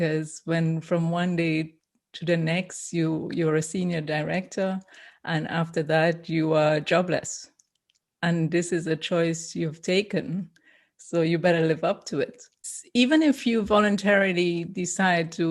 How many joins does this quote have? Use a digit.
1